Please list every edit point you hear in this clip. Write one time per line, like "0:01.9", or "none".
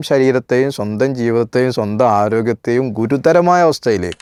none